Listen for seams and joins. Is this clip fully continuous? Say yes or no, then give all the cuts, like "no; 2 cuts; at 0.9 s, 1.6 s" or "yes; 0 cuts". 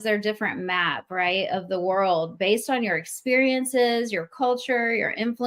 yes; 0 cuts